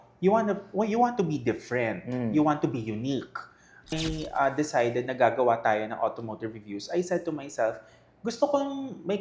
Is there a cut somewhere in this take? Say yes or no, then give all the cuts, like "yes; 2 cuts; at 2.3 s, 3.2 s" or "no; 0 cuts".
yes; 1 cut; at 3.9 s